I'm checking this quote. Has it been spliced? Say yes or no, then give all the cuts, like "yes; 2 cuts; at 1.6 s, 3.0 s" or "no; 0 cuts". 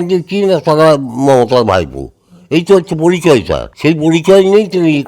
yes; 1 cut; at 3.6 s